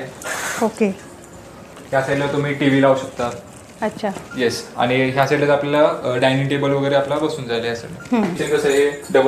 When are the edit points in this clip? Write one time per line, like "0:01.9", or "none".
0:01.7
0:08.4

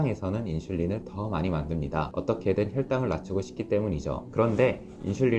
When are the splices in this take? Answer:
0:02.1
0:04.2

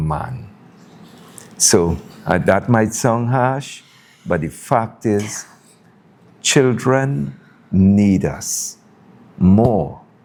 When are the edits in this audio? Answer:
none

